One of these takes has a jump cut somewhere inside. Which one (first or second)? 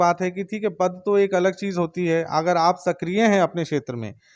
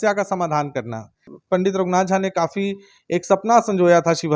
second